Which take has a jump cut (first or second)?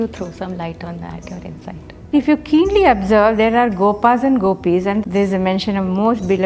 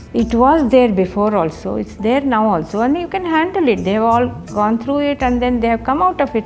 first